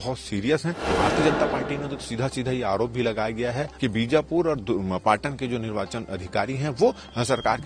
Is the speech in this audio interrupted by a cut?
yes; 2 cuts; at 0.9 s, 3.7 s

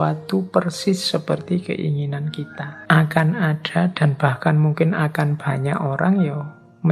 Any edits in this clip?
yes; 1 cut; at 2.7 s

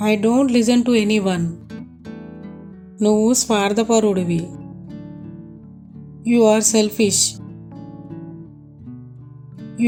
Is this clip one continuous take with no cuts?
yes; 0 cuts

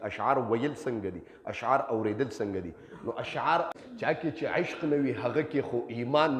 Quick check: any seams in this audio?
yes; 1 cut; at 3.7 s

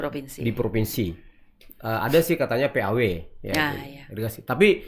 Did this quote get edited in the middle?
no; 0 cuts

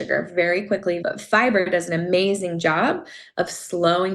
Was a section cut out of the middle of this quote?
yes; 1 cut; at 1.0 s

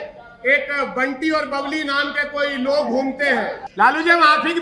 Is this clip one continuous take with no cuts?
no; 1 cut; at 3.6 s

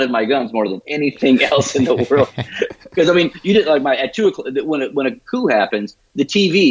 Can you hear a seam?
no; 0 cuts

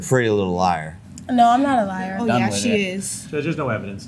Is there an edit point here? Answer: no; 0 cuts

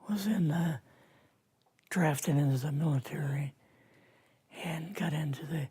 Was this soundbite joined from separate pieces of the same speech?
yes; 1 cut; at 2.7 s

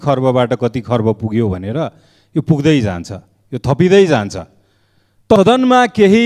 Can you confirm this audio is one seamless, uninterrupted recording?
no; 1 cut; at 5.4 s

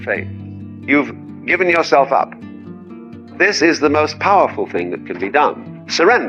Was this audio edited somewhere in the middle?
no; 0 cuts

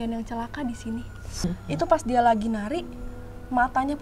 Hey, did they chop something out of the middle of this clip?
yes; 1 cut; at 1.4 s

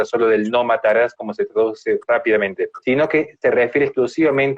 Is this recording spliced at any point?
yes; 1 cut; at 2.0 s

